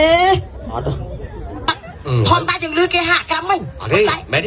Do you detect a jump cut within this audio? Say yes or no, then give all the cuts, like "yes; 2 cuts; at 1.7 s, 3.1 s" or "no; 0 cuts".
yes; 1 cut; at 1.7 s